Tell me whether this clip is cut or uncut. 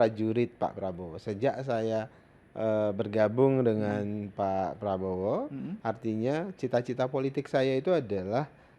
cut